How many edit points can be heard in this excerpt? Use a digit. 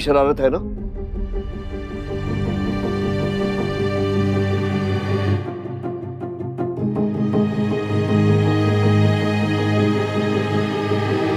0